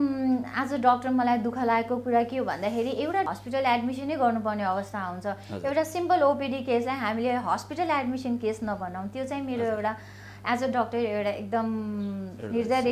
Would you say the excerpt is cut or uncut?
cut